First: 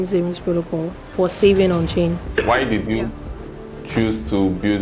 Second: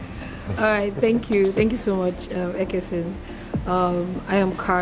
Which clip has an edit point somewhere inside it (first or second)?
first